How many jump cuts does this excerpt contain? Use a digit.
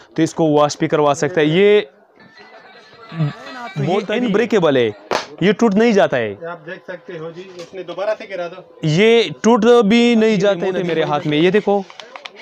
2